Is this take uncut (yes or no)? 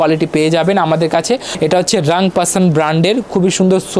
no